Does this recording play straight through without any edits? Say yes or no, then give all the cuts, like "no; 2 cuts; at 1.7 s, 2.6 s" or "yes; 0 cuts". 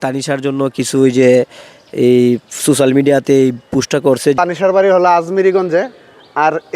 no; 1 cut; at 4.4 s